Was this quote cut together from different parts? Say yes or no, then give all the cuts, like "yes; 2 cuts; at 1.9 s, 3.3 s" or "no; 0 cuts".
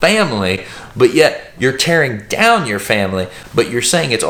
no; 0 cuts